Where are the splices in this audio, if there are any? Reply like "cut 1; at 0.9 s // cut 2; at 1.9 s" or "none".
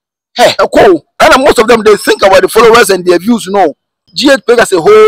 cut 1; at 1.1 s // cut 2; at 4.1 s